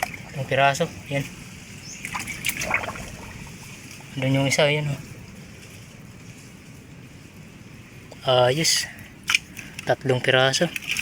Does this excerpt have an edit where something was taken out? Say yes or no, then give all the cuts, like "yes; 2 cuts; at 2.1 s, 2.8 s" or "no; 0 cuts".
no; 0 cuts